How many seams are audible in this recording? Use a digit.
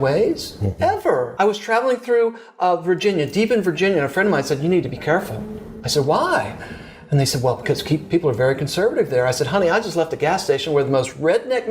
1